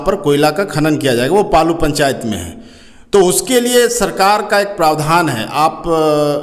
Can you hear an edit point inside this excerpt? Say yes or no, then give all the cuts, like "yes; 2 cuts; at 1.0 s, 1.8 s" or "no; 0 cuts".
no; 0 cuts